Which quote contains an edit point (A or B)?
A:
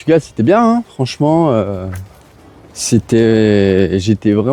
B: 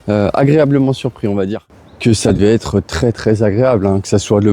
B